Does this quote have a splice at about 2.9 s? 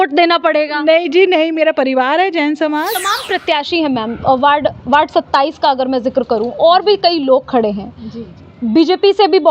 yes; 1 cut; at 2.9 s

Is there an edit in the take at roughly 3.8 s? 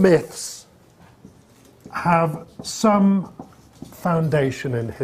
no; 1 cut; at 1.9 s

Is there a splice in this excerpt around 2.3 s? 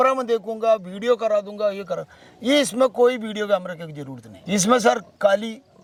no; 0 cuts

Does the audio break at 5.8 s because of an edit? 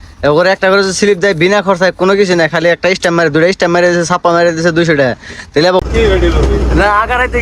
yes; 1 cut; at 5.8 s

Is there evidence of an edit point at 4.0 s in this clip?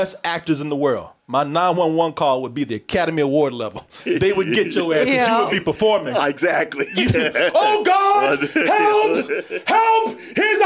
yes; 1 cut; at 4.0 s

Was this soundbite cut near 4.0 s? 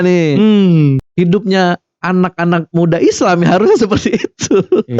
no; 1 cut; at 1.0 s

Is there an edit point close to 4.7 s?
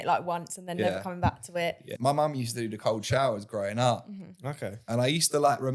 yes; 2 cuts; at 1.9 s, 4.7 s

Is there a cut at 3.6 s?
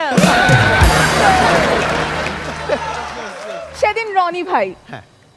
yes; 1 cut; at 3.6 s

